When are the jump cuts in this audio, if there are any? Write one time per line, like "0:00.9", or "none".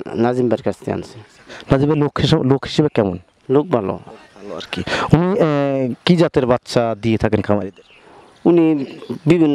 none

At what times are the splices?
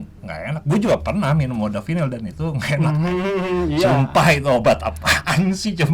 none

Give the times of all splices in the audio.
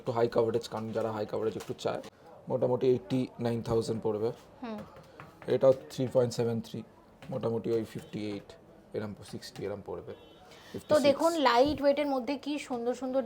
0:02.1

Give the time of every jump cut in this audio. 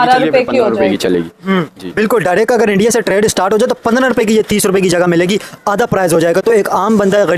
none

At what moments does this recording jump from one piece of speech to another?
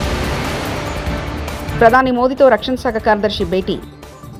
none

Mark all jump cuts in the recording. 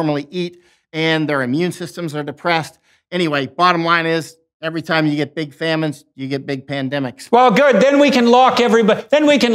0:07.2

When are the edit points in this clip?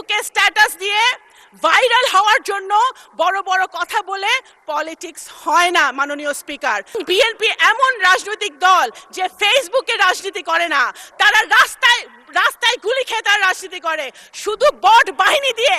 0:07.0

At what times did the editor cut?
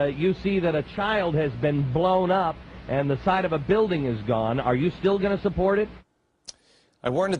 none

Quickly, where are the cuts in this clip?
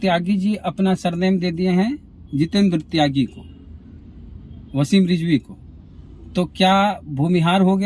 none

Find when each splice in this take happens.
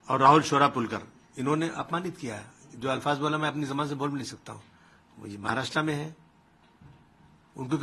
none

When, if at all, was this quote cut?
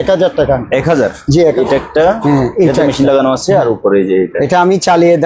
0:01.4

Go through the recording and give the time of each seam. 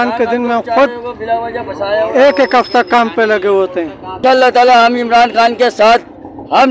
0:04.0

